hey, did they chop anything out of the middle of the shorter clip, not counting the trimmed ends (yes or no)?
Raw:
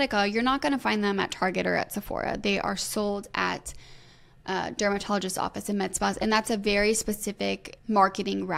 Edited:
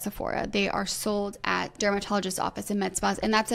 yes